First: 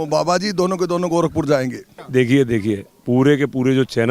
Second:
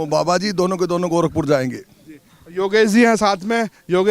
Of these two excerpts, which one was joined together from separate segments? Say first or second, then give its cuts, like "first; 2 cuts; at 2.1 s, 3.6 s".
first; 1 cut; at 2.0 s